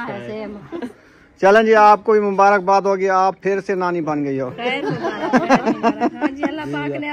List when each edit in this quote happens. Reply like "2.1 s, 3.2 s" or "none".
1.0 s